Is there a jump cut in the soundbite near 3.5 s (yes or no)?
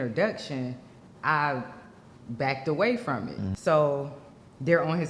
yes